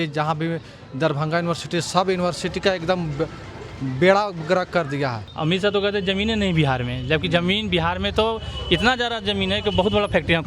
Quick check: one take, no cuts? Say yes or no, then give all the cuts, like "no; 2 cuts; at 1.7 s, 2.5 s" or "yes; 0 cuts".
no; 1 cut; at 5.3 s